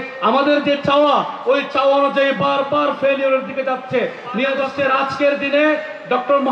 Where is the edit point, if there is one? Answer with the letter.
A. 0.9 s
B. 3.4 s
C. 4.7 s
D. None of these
C